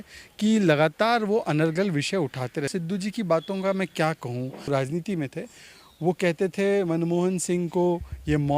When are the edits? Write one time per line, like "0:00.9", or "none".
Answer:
0:02.7
0:04.7